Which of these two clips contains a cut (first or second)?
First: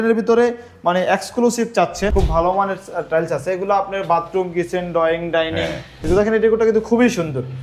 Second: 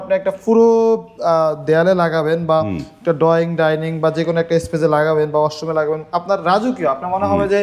first